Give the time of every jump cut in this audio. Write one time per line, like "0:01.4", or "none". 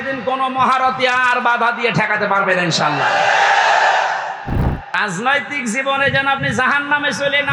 0:04.9